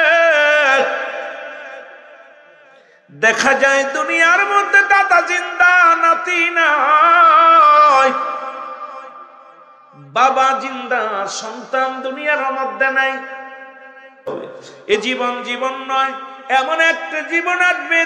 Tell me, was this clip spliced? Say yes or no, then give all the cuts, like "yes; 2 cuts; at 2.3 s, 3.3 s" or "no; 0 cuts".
yes; 1 cut; at 14.3 s